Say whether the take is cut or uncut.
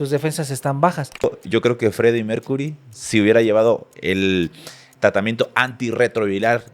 cut